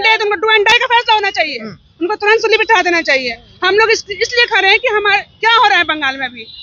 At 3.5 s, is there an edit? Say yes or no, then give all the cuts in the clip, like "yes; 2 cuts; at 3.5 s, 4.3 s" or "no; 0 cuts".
no; 0 cuts